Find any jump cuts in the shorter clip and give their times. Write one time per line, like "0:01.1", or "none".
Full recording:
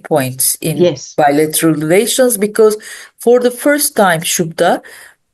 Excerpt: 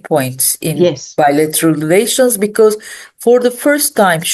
none